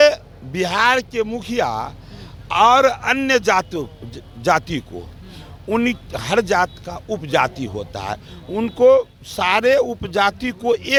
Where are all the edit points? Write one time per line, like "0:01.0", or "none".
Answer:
none